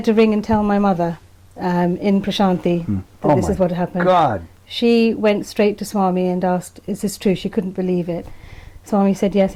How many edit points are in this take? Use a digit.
0